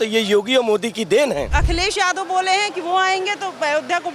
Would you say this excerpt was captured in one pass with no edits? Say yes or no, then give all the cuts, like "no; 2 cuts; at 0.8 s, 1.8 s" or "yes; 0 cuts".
no; 1 cut; at 1.5 s